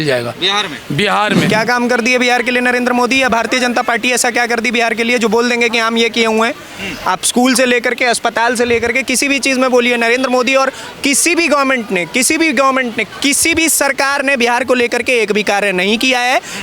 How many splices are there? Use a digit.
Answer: 1